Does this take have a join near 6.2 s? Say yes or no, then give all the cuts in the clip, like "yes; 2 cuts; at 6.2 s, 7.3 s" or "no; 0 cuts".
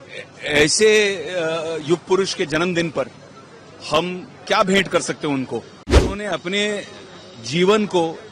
yes; 1 cut; at 6.2 s